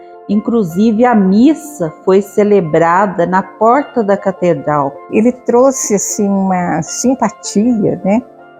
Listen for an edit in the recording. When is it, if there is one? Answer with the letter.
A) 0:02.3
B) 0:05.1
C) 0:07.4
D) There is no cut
B